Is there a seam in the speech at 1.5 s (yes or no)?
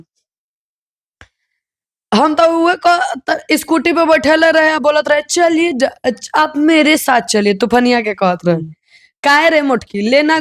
no